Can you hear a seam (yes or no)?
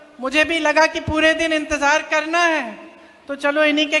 no